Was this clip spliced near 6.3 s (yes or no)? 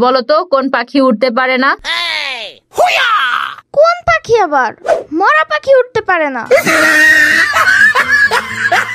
no